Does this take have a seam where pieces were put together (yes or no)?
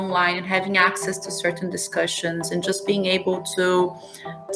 no